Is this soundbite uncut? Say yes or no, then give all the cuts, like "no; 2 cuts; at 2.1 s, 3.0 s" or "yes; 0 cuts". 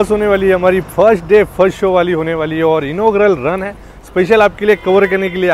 yes; 0 cuts